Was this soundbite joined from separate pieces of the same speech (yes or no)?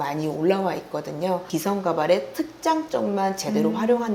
yes